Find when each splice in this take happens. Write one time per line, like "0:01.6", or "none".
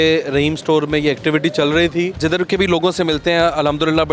0:02.2